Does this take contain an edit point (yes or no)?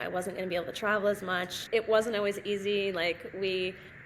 yes